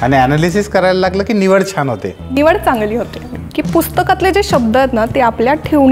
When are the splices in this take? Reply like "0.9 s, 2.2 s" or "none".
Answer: 3.4 s